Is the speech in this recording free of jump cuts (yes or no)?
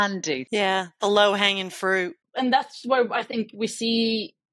no